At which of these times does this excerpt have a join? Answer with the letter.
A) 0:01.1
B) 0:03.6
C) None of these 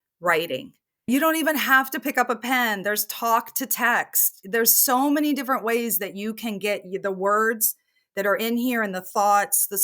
A